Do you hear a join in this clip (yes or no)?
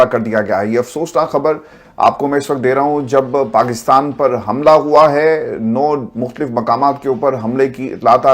no